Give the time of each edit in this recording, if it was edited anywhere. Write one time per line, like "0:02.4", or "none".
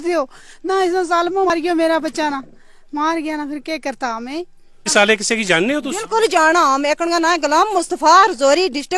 0:01.5
0:04.9